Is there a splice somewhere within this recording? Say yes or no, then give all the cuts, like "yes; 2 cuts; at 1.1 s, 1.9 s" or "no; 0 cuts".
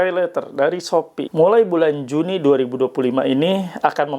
yes; 1 cut; at 1.2 s